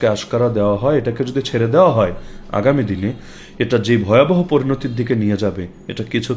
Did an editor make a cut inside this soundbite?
no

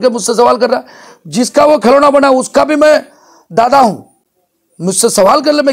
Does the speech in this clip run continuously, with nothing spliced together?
yes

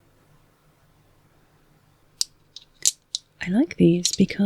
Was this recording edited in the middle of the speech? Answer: yes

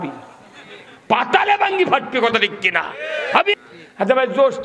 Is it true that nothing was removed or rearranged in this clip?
no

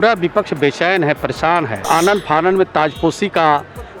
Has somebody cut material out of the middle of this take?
yes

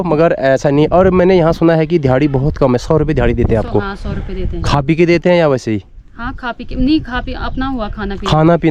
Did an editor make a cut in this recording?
no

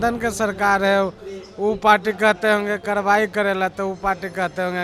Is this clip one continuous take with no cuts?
yes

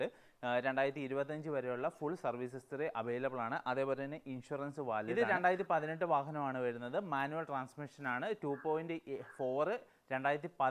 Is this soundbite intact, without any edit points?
no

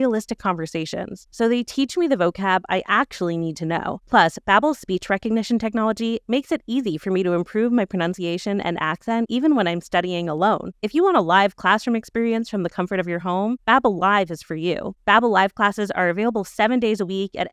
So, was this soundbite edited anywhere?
no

